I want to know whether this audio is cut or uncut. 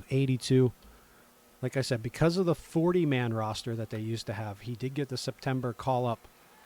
uncut